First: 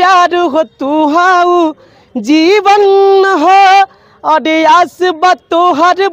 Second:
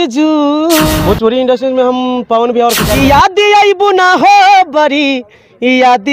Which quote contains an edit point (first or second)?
second